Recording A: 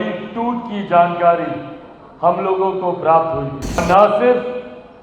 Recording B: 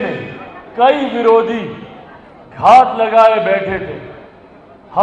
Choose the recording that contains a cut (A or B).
A